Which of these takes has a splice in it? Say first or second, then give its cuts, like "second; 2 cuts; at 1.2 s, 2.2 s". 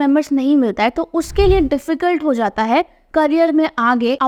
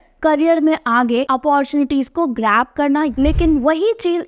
second; 1 cut; at 3.1 s